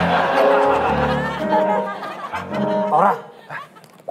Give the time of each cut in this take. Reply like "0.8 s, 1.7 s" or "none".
none